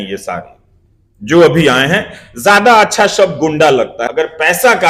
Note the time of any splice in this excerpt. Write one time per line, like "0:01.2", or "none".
0:04.0